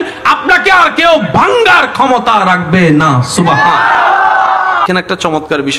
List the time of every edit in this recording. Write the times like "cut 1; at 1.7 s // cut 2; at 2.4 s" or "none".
cut 1; at 4.9 s